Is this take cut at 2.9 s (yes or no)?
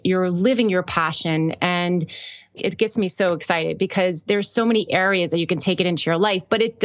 no